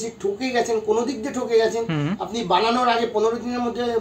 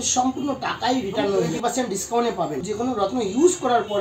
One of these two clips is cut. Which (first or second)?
second